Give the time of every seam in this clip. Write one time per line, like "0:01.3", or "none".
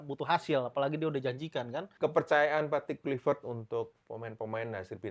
0:01.9